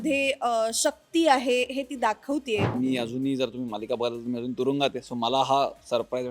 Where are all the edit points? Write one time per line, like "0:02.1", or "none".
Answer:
0:02.7